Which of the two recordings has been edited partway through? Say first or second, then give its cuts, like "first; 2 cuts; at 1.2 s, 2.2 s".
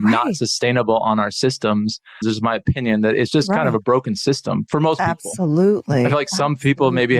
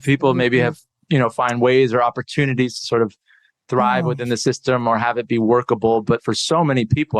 first; 1 cut; at 2.2 s